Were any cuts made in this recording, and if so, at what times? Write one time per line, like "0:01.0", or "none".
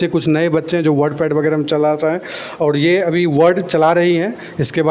none